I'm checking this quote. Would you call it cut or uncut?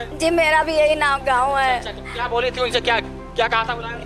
uncut